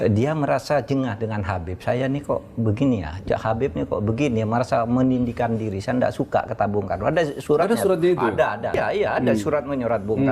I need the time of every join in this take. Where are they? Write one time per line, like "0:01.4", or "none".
0:08.8